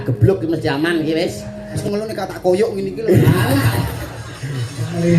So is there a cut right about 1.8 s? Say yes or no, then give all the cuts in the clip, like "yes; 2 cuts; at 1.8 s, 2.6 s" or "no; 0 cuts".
yes; 1 cut; at 1.8 s